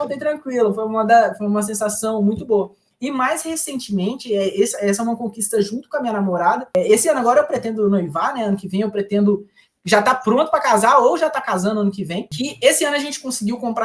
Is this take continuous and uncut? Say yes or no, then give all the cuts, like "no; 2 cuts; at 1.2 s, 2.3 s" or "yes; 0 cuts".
yes; 0 cuts